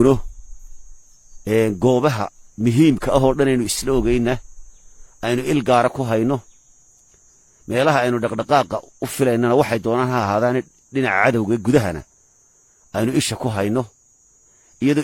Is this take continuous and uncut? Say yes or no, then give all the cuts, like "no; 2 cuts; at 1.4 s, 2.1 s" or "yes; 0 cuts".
yes; 0 cuts